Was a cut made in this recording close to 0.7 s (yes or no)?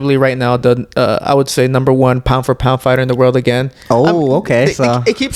no